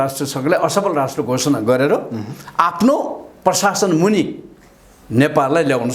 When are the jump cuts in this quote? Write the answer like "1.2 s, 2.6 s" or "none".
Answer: none